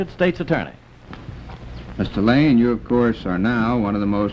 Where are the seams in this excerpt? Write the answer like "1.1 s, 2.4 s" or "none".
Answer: 2.9 s

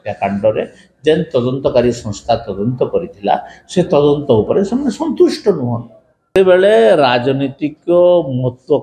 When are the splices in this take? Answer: 6.4 s

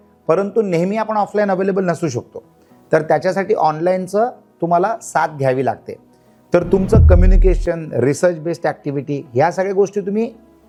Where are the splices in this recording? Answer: none

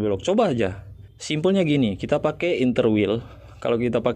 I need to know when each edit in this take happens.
none

